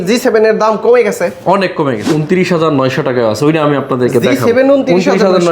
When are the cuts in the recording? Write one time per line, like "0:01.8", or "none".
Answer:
0:02.0